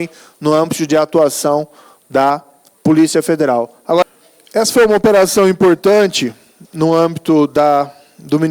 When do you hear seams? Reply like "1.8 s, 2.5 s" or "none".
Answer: 4.0 s